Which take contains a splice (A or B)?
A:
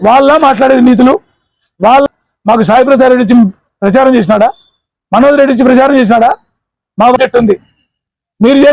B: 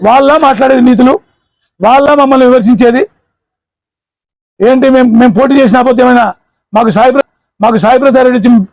A